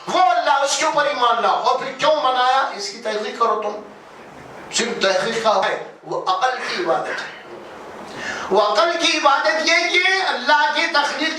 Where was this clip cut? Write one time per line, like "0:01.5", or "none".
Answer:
0:05.6